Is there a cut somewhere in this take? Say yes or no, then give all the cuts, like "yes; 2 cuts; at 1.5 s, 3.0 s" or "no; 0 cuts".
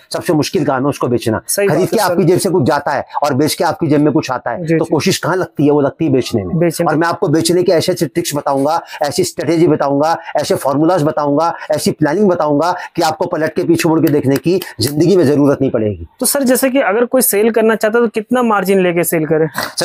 no; 0 cuts